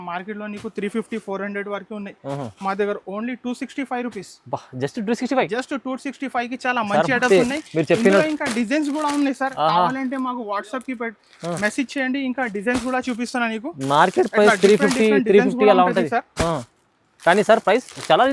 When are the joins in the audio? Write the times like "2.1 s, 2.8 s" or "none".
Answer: none